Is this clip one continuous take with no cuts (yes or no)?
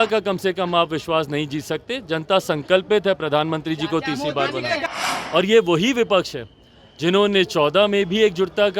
no